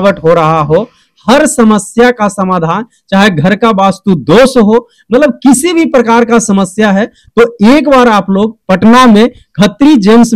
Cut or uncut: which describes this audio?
uncut